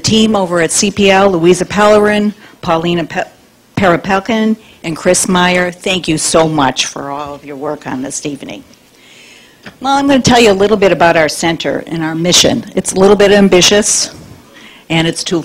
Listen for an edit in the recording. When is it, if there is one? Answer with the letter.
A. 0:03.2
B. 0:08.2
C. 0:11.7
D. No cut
C